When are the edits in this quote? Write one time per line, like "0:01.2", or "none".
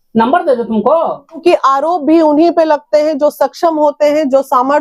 0:01.4